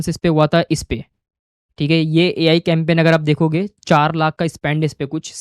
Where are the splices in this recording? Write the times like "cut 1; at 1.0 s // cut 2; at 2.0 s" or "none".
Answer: none